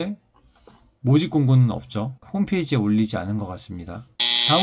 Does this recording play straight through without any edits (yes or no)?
yes